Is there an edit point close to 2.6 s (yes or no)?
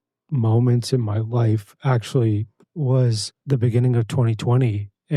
yes